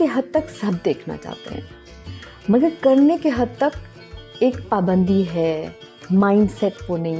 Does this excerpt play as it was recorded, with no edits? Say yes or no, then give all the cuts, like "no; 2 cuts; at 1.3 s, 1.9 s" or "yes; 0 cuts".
yes; 0 cuts